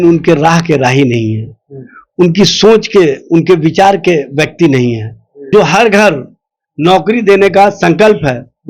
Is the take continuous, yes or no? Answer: no